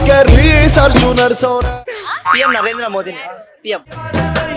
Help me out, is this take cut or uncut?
cut